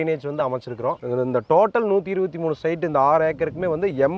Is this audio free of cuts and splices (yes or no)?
yes